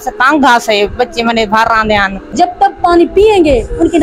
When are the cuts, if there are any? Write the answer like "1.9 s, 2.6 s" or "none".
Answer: 2.3 s